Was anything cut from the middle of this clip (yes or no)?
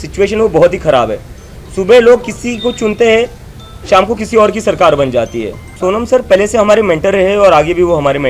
yes